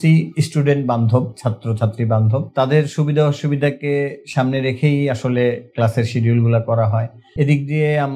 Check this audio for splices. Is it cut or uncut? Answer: uncut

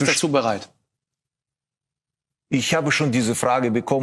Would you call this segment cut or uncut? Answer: uncut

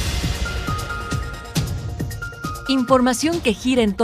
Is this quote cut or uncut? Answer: cut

